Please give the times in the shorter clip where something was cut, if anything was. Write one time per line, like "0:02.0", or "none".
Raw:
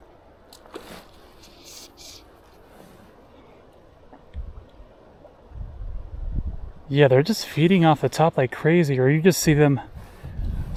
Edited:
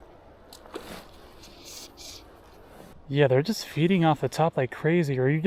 0:02.9